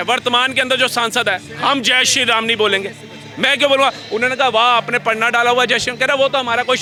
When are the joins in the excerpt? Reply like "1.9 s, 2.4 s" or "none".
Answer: none